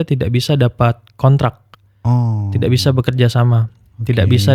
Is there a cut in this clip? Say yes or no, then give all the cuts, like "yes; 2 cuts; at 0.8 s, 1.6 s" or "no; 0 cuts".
no; 0 cuts